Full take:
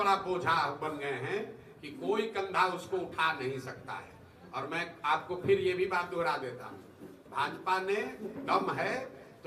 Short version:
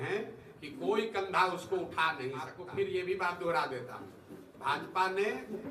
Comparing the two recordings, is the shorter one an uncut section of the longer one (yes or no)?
no